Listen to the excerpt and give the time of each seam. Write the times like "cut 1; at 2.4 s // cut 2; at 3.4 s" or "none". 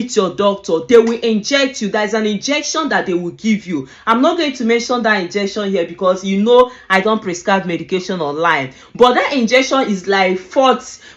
none